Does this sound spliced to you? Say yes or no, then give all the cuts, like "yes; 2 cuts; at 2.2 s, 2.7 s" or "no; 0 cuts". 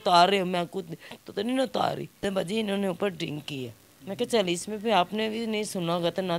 yes; 1 cut; at 2.2 s